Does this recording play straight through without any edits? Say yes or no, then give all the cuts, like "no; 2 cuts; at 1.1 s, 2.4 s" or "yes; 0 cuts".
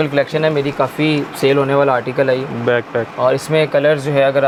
yes; 0 cuts